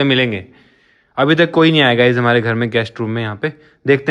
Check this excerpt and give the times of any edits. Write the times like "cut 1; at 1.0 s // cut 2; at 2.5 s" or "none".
none